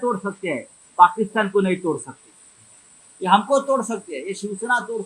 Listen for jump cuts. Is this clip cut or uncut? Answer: uncut